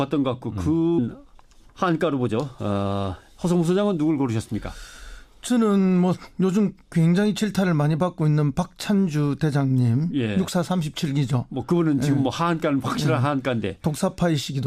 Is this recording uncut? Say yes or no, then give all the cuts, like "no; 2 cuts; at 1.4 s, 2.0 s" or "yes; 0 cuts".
yes; 0 cuts